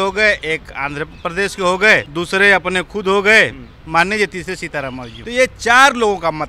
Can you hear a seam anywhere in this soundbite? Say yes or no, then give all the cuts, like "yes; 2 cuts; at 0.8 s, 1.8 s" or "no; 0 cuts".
yes; 2 cuts; at 2.1 s, 5.1 s